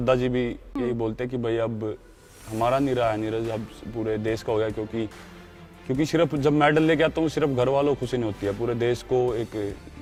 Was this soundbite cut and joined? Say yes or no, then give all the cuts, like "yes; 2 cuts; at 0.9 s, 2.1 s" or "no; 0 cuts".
no; 0 cuts